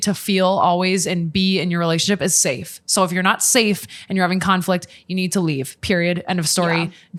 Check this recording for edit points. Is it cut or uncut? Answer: uncut